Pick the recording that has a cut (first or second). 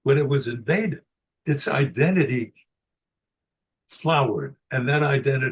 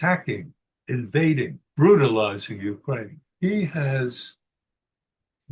second